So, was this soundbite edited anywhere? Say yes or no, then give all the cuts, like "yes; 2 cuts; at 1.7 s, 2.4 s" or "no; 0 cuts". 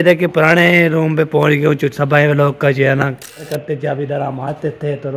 yes; 1 cut; at 3.4 s